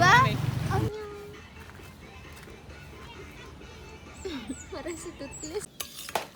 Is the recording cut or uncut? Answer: uncut